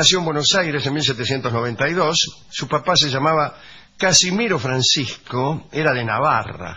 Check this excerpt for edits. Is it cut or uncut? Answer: cut